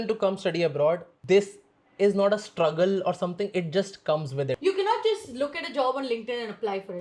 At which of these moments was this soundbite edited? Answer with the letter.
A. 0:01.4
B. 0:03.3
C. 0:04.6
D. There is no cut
C